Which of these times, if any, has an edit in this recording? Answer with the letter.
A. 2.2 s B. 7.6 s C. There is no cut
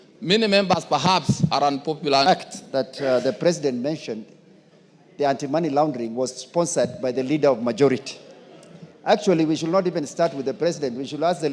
A